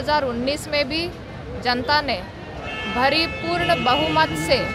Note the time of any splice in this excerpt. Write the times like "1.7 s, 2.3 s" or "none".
none